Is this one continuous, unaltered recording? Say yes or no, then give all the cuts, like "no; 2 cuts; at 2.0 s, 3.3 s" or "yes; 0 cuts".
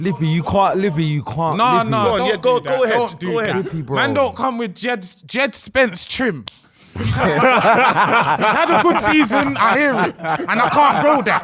yes; 0 cuts